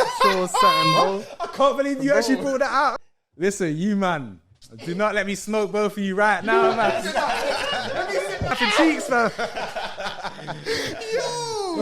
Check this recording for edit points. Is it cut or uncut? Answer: cut